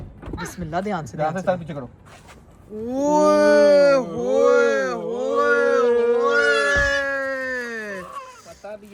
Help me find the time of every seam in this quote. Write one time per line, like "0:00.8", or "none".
none